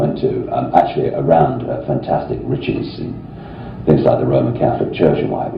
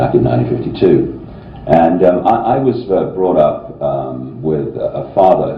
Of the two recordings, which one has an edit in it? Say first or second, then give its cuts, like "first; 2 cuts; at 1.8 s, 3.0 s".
first; 1 cut; at 2.6 s